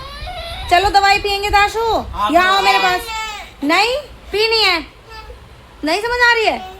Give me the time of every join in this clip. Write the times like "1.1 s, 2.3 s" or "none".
4.2 s